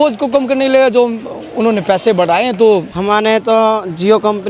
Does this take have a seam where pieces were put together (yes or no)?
yes